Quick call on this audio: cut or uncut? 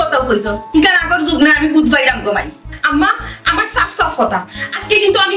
uncut